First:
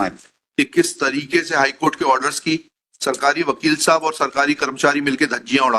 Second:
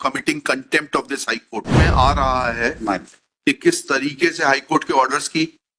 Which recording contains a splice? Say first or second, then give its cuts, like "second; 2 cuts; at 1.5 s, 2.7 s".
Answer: second; 1 cut; at 1.8 s